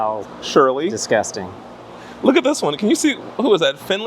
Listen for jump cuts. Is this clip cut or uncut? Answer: cut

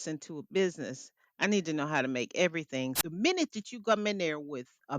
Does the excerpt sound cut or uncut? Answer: cut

